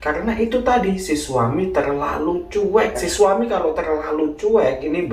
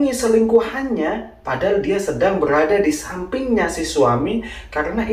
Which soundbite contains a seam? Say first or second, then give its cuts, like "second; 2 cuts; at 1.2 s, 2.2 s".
first; 1 cut; at 3.0 s